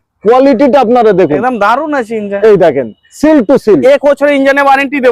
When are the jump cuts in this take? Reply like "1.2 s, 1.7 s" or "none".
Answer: 3.8 s